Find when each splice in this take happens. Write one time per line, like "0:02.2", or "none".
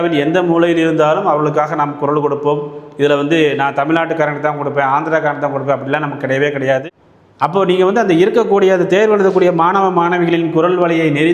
0:06.8